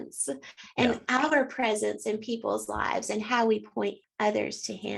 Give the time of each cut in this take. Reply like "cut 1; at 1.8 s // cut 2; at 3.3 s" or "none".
cut 1; at 4.0 s

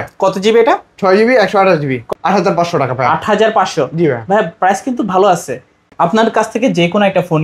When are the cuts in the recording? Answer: cut 1; at 2.0 s // cut 2; at 5.7 s

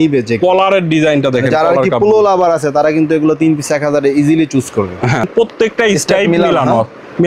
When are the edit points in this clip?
cut 1; at 5.2 s

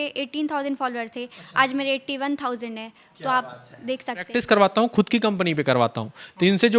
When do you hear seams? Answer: cut 1; at 4.4 s

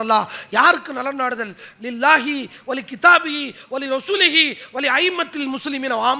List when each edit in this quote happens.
none

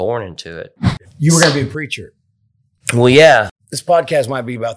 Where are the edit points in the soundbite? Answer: cut 1; at 1.1 s // cut 2; at 3.5 s

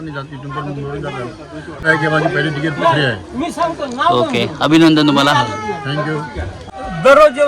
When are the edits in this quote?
cut 1; at 1.8 s // cut 2; at 6.6 s

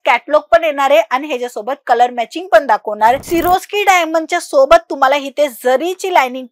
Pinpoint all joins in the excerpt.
cut 1; at 3.2 s

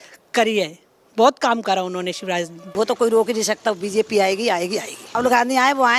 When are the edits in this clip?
cut 1; at 2.6 s // cut 2; at 5.1 s

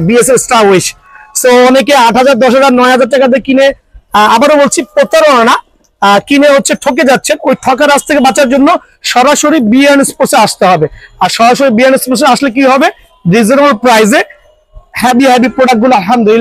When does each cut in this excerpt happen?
none

